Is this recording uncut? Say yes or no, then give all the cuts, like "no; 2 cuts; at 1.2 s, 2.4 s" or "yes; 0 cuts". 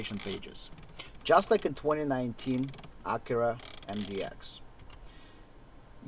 yes; 0 cuts